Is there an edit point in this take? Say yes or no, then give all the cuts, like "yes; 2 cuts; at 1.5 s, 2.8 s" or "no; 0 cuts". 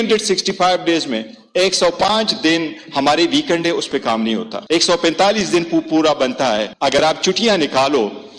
no; 0 cuts